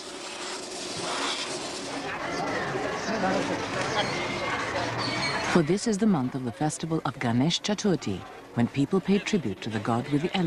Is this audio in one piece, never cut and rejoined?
no; 1 cut; at 2.2 s

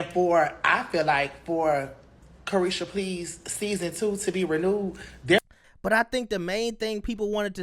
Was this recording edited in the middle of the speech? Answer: yes; 1 cut; at 5.6 s

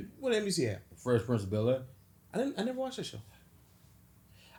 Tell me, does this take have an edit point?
no; 0 cuts

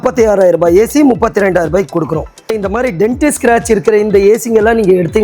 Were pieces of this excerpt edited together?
yes; 1 cut; at 2.4 s

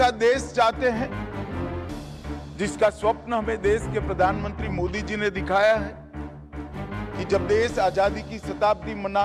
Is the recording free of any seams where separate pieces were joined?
yes; 0 cuts

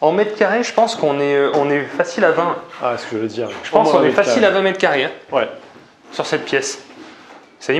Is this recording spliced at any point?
no; 0 cuts

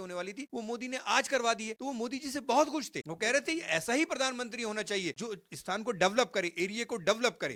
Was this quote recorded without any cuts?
yes; 0 cuts

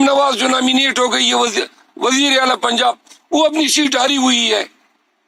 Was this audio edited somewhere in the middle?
no; 0 cuts

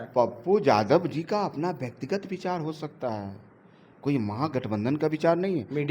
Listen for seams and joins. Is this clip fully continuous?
yes; 0 cuts

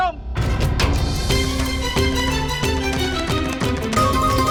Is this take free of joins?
yes; 0 cuts

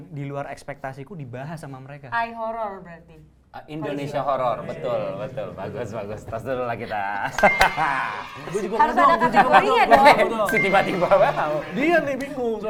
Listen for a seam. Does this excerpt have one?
no; 0 cuts

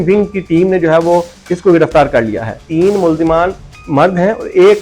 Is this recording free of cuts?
no; 1 cut; at 2.6 s

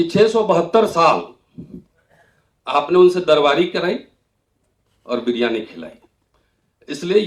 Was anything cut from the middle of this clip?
no; 0 cuts

